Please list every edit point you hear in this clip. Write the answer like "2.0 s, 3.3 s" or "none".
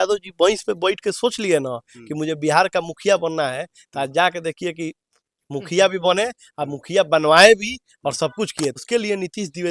8.8 s

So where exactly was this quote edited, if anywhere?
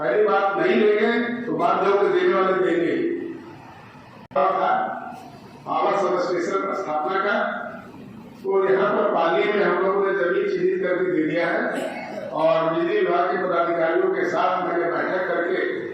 4.4 s

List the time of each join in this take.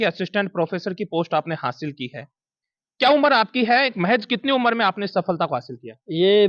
none

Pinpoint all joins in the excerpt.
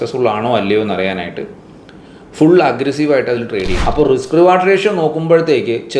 3.8 s

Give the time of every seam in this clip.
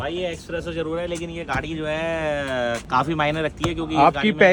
none

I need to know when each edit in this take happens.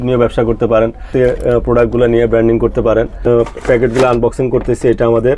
1.1 s, 3.3 s

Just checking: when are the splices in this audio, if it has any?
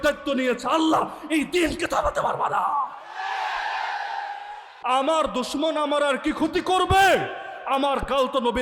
4.7 s

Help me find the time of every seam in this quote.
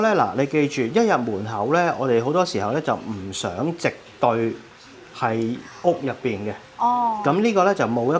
none

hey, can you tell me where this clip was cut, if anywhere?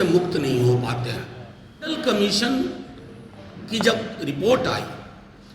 2.0 s

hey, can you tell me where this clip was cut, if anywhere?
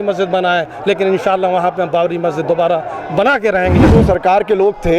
3.9 s

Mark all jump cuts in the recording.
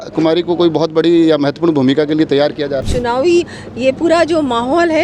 2.9 s

